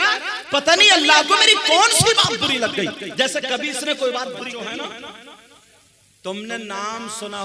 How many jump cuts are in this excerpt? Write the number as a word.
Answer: one